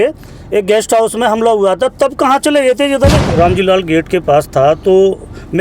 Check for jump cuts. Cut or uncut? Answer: cut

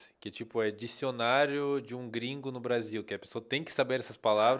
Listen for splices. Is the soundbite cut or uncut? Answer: uncut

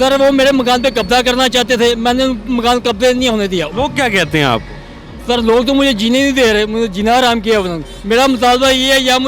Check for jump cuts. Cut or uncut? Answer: cut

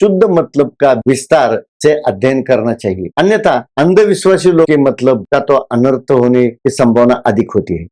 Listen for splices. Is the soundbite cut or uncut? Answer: cut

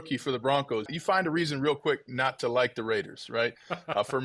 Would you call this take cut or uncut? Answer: cut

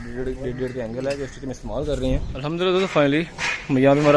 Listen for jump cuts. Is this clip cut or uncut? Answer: cut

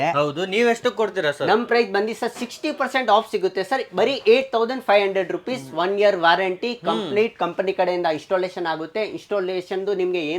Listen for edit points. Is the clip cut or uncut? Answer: uncut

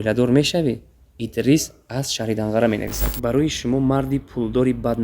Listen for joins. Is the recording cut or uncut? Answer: cut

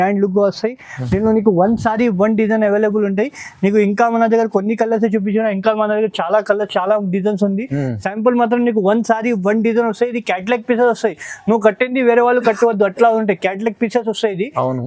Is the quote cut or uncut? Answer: uncut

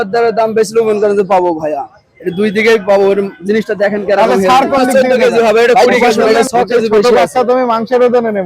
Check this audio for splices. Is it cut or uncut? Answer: cut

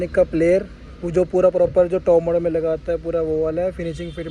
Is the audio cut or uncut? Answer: uncut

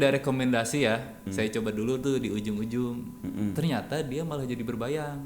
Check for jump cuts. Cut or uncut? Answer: cut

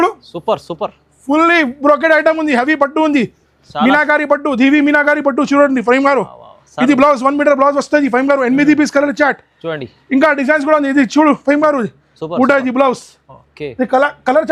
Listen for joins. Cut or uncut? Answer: uncut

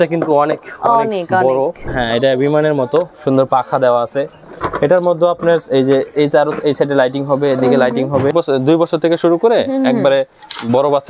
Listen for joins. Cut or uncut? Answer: cut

